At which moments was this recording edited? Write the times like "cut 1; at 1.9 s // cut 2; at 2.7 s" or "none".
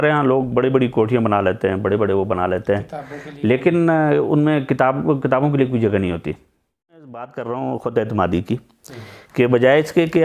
cut 1; at 7.0 s